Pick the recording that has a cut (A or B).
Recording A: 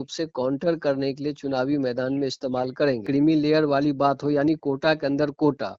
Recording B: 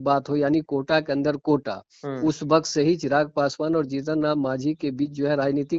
A